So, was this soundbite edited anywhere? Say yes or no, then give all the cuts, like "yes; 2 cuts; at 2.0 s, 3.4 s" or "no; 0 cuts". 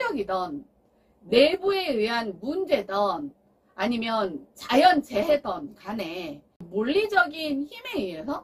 yes; 1 cut; at 6.7 s